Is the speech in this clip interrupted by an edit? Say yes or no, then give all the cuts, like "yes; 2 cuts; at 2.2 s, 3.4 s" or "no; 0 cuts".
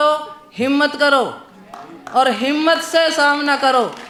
no; 0 cuts